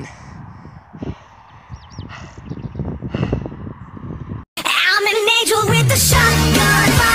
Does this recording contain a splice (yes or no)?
no